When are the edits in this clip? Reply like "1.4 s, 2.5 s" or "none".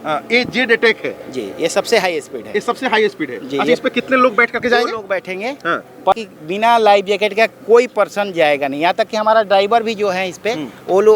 6.1 s